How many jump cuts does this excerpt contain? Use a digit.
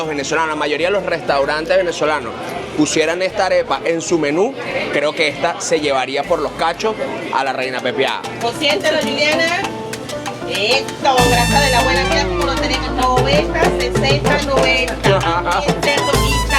1